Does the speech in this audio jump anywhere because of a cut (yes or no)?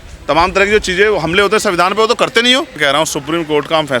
yes